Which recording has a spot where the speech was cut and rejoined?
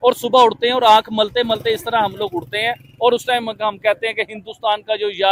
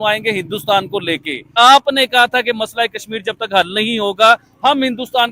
second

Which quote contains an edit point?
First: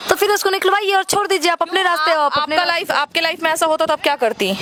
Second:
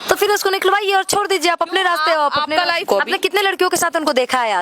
second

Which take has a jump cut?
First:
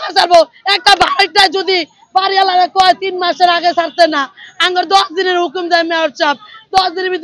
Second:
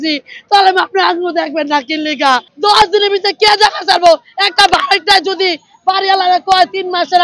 second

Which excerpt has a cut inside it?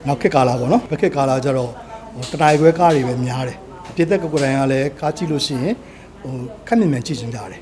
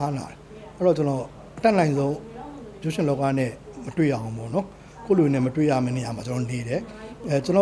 first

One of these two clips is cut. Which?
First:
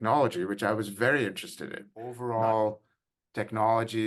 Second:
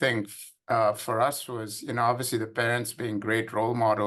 first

